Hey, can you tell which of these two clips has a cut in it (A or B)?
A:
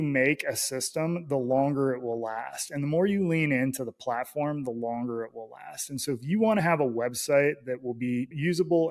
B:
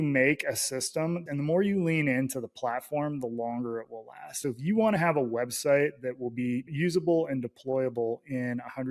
B